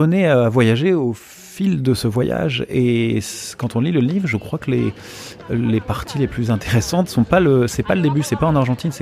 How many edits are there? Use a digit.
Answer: 0